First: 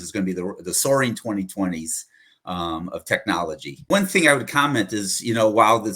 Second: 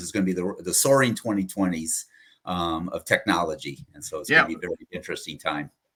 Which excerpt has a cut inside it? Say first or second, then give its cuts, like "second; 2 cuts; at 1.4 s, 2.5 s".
first; 1 cut; at 3.9 s